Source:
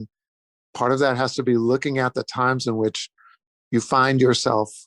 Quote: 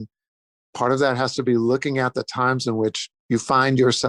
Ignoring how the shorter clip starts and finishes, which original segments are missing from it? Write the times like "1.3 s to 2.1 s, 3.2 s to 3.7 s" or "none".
3.1 s to 3.5 s